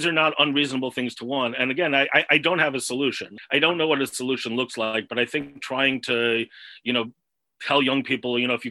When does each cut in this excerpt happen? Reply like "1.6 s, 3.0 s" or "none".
3.3 s